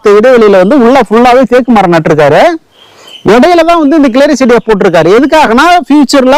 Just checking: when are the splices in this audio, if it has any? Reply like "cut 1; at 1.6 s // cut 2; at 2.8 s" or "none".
none